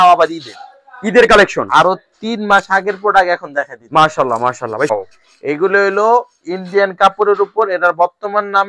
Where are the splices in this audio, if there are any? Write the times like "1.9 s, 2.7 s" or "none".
4.9 s